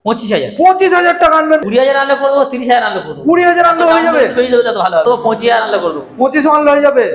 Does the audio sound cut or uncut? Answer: cut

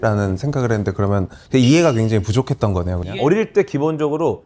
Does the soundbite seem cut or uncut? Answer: cut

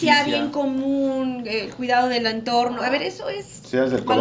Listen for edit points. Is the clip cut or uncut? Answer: uncut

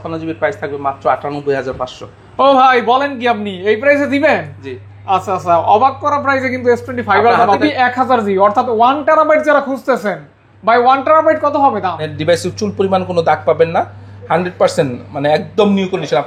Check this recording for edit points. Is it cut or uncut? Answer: cut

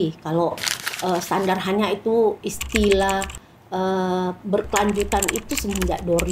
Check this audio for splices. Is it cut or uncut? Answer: uncut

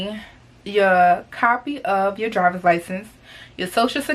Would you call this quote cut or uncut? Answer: uncut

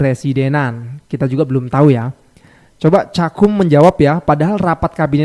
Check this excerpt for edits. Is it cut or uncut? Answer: uncut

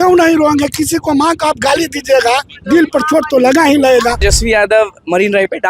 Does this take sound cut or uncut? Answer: cut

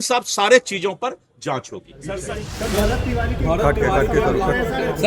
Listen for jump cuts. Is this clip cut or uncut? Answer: cut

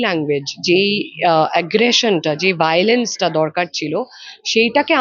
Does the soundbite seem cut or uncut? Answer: uncut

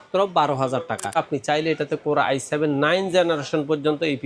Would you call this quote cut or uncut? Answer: cut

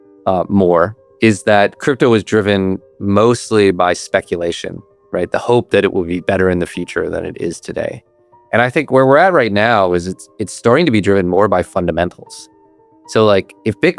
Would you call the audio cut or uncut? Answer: cut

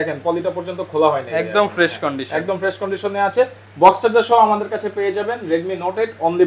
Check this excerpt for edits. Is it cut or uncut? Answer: uncut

